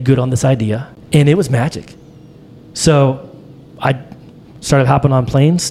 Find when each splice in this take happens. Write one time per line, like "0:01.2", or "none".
0:00.9